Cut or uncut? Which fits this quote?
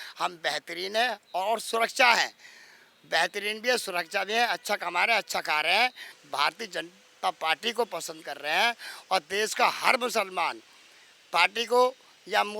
cut